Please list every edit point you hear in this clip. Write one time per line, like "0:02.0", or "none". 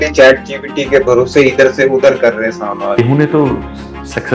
0:03.0